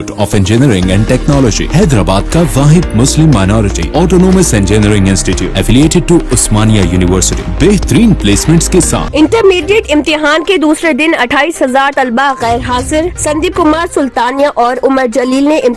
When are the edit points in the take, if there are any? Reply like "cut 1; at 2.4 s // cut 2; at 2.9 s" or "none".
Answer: cut 1; at 9.1 s